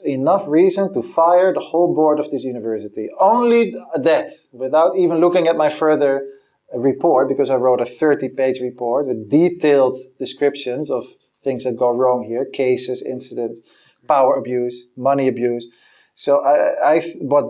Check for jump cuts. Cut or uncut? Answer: uncut